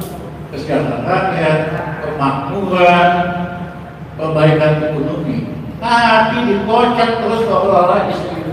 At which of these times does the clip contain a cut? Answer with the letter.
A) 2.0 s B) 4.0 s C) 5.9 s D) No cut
D